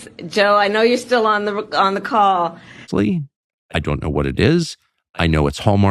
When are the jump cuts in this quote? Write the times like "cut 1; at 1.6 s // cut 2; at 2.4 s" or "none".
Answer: cut 1; at 2.9 s

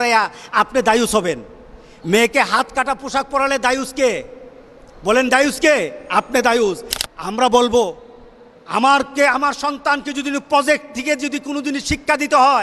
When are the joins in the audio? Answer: cut 1; at 6.9 s

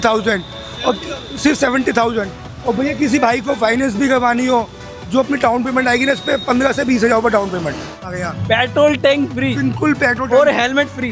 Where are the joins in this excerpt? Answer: cut 1; at 8.0 s

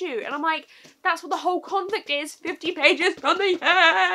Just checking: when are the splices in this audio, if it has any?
none

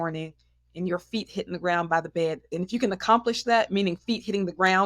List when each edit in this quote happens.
cut 1; at 2.5 s

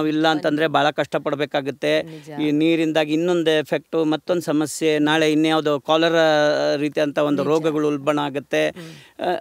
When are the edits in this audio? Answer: none

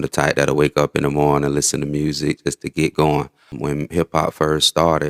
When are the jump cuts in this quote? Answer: cut 1; at 3.5 s

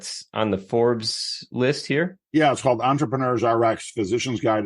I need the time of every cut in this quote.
cut 1; at 2.2 s

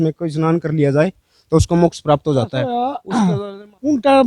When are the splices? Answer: cut 1; at 2.7 s

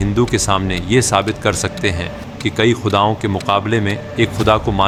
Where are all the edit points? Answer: none

